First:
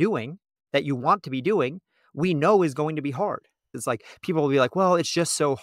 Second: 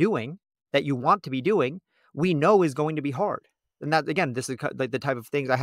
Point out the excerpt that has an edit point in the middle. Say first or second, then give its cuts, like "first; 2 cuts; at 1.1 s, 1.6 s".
first; 1 cut; at 3.7 s